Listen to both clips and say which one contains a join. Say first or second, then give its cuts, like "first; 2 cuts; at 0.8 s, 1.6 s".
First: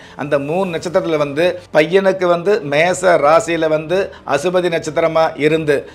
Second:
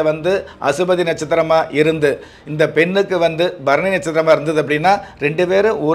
first; 1 cut; at 1.6 s